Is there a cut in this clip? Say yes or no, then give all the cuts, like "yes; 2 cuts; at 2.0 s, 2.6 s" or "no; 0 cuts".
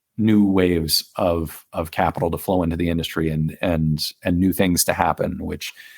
no; 0 cuts